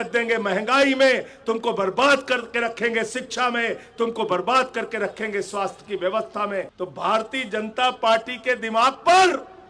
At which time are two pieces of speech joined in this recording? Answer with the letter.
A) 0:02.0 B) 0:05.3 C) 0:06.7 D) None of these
C